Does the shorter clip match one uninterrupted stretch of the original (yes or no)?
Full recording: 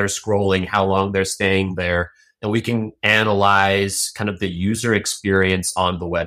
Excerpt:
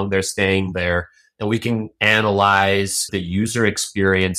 no